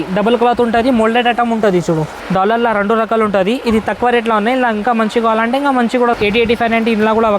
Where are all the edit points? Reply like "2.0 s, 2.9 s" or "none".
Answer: 2.2 s, 6.1 s